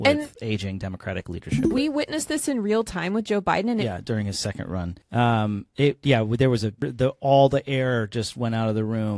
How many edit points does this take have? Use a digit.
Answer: 4